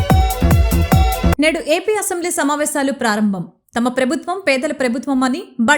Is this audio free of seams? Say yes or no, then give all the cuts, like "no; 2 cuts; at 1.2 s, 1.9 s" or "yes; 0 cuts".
no; 1 cut; at 1.3 s